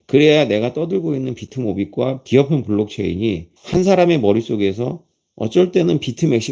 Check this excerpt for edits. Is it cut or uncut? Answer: cut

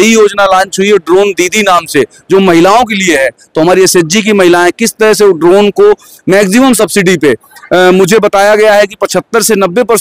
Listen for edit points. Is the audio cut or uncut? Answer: uncut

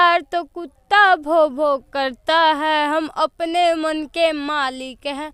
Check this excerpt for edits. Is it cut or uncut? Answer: uncut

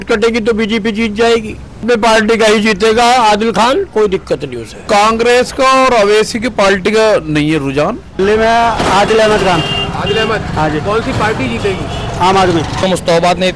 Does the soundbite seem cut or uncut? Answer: cut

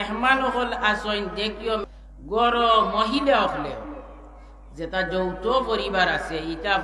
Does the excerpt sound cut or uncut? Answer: cut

